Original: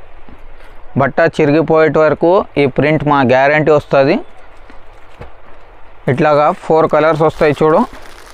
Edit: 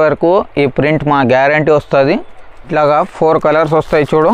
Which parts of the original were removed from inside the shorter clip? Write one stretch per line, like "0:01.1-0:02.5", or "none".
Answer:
0:04.7-0:06.2